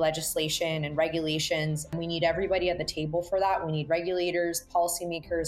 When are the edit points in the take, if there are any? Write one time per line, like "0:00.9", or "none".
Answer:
0:01.9